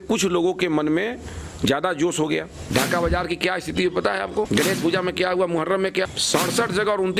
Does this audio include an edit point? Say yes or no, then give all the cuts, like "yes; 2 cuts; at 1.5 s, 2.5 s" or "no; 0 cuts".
yes; 3 cuts; at 2.6 s, 4.5 s, 6.1 s